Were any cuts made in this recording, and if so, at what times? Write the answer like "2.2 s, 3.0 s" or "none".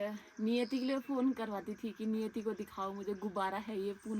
none